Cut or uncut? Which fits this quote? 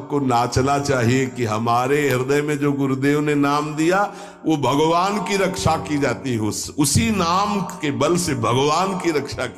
uncut